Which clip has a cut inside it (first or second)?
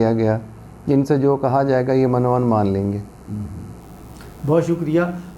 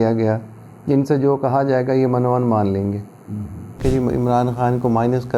second